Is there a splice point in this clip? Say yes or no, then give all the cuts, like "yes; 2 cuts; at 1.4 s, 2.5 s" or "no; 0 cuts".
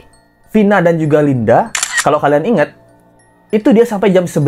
no; 0 cuts